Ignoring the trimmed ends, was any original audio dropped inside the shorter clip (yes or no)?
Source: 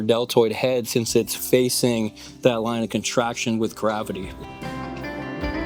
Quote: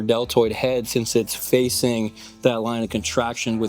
no